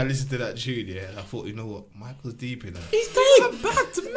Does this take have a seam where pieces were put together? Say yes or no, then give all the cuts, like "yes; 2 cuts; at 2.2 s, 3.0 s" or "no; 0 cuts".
no; 0 cuts